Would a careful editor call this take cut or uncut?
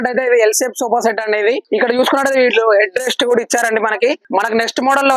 cut